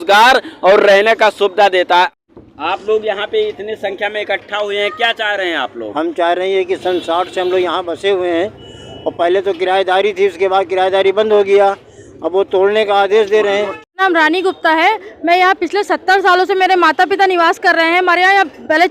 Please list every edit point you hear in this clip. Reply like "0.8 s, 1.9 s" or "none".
2.1 s, 14.0 s